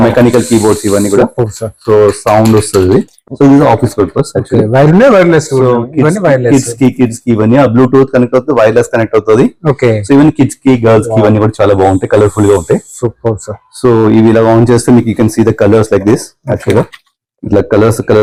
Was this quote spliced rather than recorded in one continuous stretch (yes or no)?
no